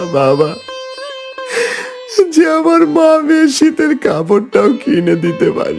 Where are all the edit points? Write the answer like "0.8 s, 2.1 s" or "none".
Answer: none